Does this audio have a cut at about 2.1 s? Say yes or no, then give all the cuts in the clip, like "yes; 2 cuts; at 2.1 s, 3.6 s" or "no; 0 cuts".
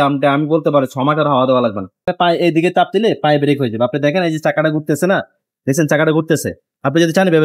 yes; 1 cut; at 2.1 s